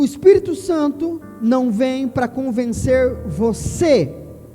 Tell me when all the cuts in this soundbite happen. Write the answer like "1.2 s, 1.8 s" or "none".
none

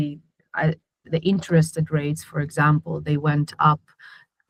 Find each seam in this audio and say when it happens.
none

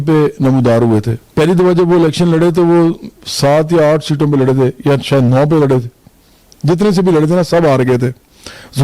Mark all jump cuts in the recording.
1.2 s

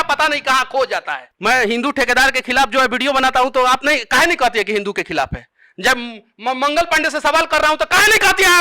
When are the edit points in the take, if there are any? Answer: none

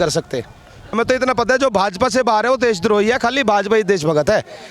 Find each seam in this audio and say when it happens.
0.9 s

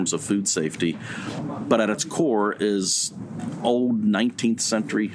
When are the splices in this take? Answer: 1.4 s, 3.3 s

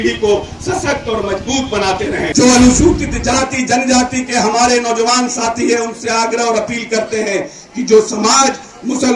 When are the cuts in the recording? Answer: 2.3 s

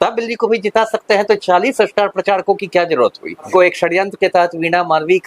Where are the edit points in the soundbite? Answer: 3.5 s

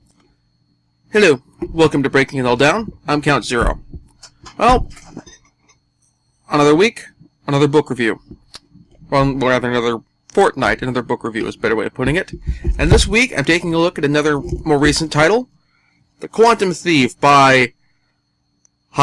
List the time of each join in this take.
9.6 s

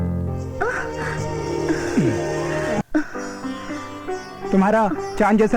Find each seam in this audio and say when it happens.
2.9 s

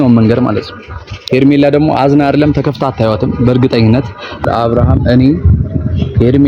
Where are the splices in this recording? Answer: 4.4 s

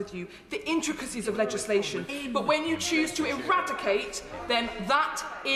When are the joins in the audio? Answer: none

